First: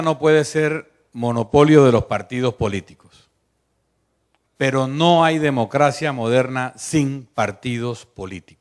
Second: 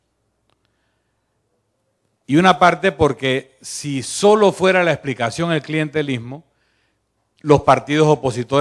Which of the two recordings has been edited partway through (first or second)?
first